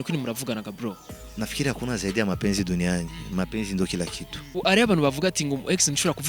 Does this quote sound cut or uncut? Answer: cut